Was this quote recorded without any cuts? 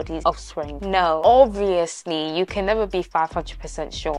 yes; 0 cuts

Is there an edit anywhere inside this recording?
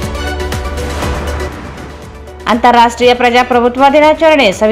yes; 1 cut; at 2.1 s

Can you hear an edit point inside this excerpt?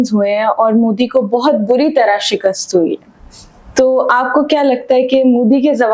no; 0 cuts

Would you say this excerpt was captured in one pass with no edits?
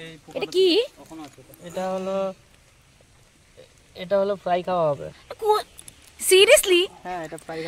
yes; 0 cuts

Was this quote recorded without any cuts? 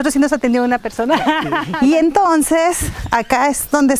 no; 1 cut; at 1.6 s

